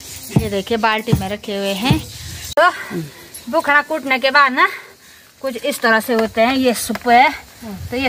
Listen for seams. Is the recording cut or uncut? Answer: cut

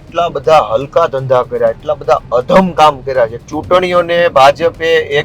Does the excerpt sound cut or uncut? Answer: cut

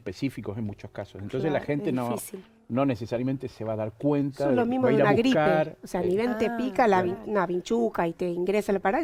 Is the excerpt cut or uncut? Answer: uncut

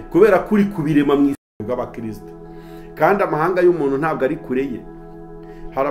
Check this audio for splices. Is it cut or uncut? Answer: cut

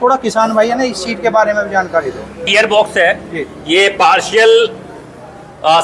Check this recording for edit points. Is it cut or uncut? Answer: cut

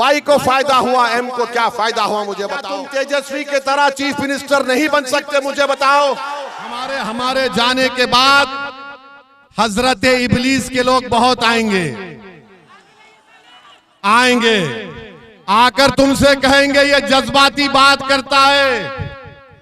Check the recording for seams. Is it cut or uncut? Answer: cut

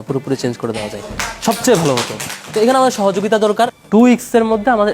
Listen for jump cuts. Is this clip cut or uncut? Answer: cut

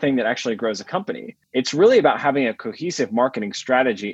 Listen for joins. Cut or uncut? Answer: cut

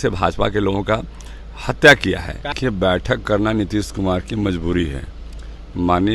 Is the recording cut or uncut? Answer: cut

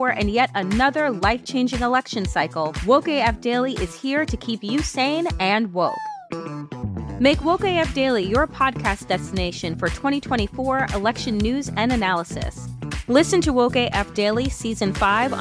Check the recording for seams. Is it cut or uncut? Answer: uncut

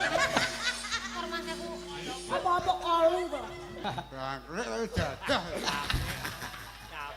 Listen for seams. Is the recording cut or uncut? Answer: cut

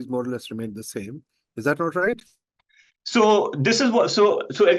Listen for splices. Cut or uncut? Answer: uncut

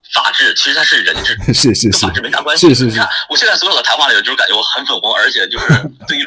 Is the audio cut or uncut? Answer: cut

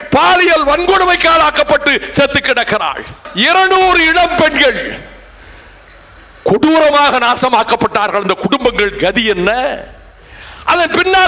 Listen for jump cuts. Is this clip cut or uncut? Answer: cut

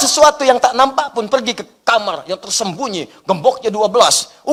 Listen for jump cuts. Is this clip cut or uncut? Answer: uncut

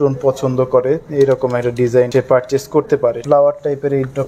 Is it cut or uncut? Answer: cut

